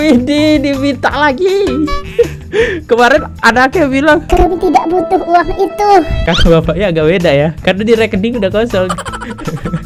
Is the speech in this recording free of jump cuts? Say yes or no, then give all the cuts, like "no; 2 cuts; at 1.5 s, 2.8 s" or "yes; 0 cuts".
yes; 0 cuts